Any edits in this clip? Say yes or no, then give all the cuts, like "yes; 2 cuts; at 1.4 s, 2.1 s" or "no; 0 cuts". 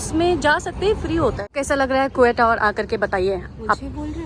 yes; 1 cut; at 1.5 s